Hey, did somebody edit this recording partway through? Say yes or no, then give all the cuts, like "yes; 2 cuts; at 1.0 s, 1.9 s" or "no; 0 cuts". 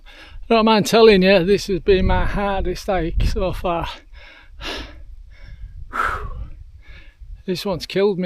no; 0 cuts